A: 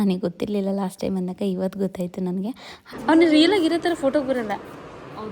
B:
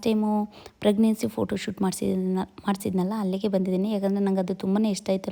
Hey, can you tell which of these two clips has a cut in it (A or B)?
A